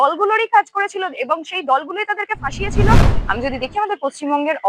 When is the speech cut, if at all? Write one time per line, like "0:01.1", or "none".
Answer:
0:03.1